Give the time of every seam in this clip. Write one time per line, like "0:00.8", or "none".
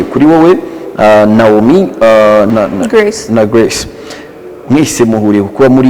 0:02.5